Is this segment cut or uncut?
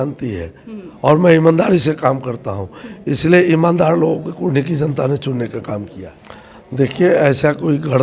cut